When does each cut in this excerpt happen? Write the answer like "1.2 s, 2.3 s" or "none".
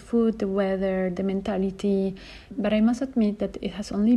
2.5 s